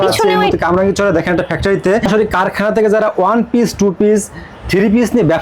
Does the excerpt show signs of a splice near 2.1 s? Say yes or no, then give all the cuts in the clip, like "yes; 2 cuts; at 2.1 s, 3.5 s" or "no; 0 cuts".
yes; 1 cut; at 2.1 s